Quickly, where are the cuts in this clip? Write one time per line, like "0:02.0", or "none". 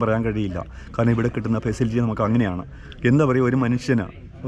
none